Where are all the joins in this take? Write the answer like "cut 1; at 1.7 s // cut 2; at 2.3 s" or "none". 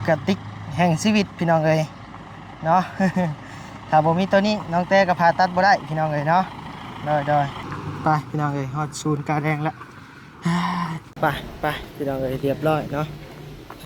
cut 1; at 11.0 s